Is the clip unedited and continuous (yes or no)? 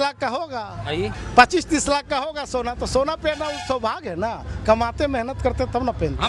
no